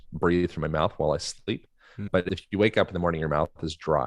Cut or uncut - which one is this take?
cut